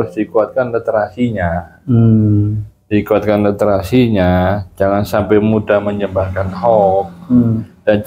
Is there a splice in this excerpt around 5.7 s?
no; 0 cuts

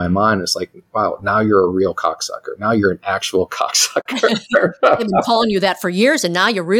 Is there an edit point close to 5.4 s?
no; 0 cuts

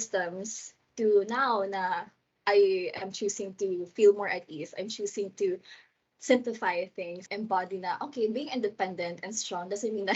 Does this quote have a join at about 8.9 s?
no; 1 cut; at 7.3 s

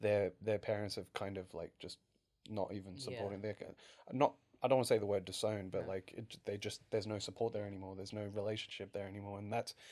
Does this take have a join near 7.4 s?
no; 0 cuts

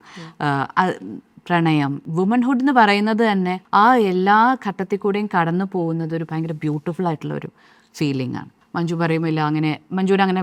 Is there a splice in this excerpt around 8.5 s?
yes; 3 cuts; at 2.0 s, 3.6 s, 8.5 s

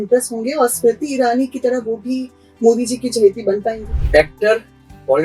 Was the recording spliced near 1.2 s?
no; 1 cut; at 3.9 s

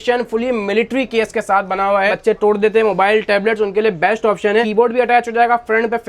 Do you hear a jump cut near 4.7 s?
yes; 2 cuts; at 2.2 s, 4.7 s

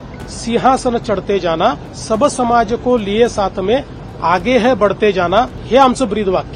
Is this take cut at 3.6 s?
no; 2 cuts; at 1.9 s, 5.6 s

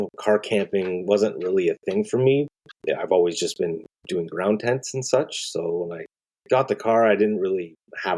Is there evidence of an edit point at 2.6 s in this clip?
yes; 1 cut; at 2.6 s

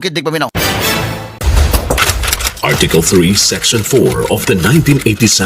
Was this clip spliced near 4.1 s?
no; 1 cut; at 1.4 s

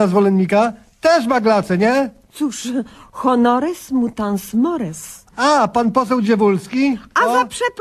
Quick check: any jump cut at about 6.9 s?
yes; 1 cut; at 6.9 s

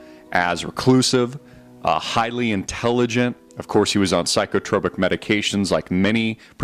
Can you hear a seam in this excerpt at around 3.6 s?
yes; 1 cut; at 3.6 s

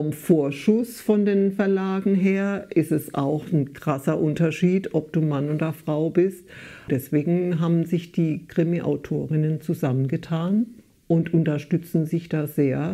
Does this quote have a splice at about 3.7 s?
no; 2 cuts; at 6.9 s, 10.9 s

